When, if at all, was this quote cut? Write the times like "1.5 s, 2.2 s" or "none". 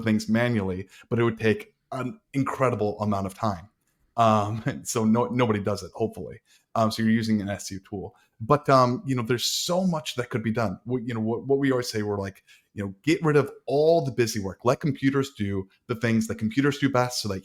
none